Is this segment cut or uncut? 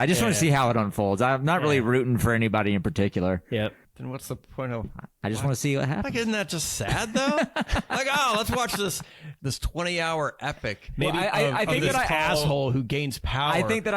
cut